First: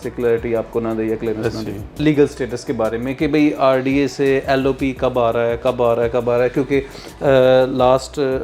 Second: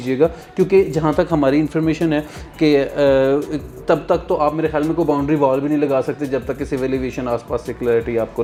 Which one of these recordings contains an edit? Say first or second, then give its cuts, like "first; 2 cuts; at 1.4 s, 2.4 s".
first; 1 cut; at 1.9 s